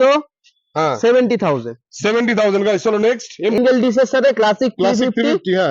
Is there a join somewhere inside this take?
yes; 1 cut; at 3.6 s

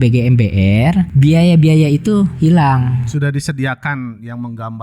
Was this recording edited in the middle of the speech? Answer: yes; 2 cuts; at 1.1 s, 3.0 s

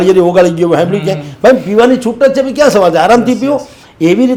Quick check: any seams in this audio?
no; 0 cuts

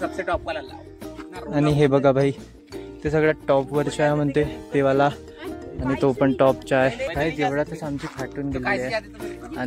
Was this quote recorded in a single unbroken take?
yes; 0 cuts

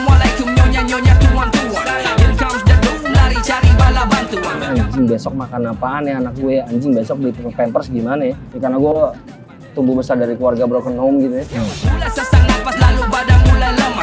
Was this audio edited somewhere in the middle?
yes; 3 cuts; at 4.6 s, 8.5 s, 11.8 s

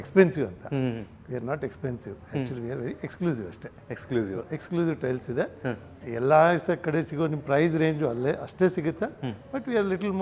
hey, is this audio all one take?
yes; 0 cuts

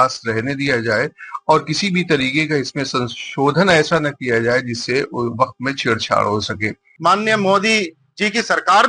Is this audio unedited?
no; 1 cut; at 6.8 s

